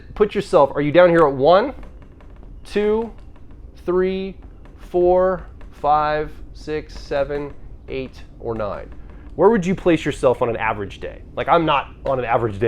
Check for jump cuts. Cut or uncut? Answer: uncut